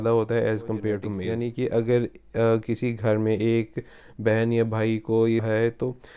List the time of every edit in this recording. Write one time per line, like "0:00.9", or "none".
0:01.2
0:05.4

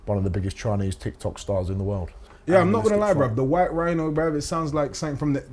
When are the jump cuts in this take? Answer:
0:02.2

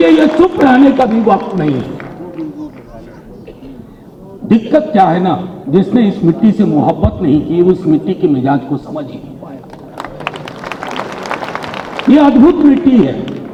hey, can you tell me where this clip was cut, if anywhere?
none

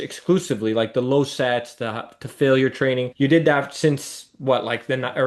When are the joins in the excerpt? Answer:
none

